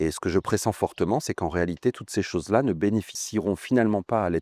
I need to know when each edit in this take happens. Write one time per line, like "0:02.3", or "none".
0:03.2